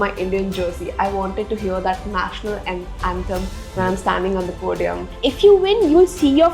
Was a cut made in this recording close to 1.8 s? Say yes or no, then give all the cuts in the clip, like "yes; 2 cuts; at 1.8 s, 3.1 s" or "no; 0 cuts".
no; 1 cut; at 5.1 s